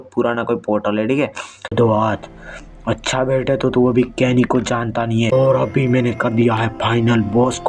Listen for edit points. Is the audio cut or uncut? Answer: cut